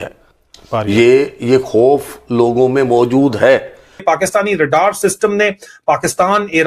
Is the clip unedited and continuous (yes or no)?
no